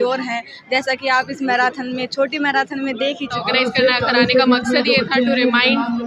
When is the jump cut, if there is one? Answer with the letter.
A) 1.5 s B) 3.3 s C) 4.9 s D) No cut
B